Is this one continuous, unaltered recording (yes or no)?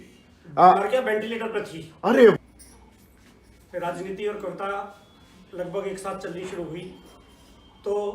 no